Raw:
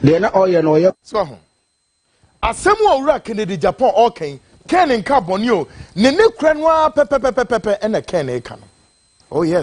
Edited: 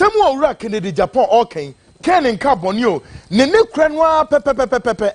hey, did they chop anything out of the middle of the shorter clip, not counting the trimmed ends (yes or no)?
no